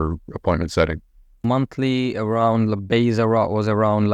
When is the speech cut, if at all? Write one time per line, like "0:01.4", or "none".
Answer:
0:01.4

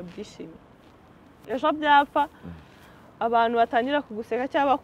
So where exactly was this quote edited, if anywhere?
none

